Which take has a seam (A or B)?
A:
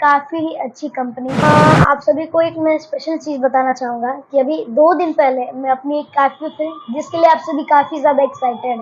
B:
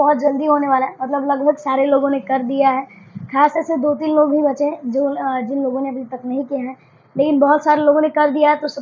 A